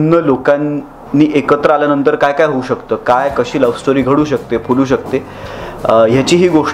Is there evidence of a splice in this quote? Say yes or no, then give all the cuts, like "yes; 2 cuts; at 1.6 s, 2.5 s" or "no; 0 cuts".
no; 0 cuts